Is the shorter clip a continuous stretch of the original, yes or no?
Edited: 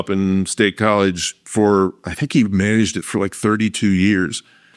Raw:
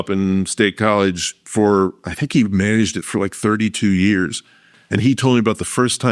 yes